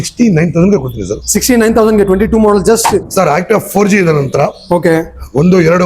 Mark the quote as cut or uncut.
cut